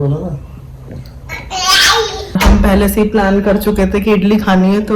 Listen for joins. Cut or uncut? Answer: cut